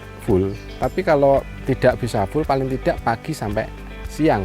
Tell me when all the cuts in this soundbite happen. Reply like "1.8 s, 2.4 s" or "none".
1.5 s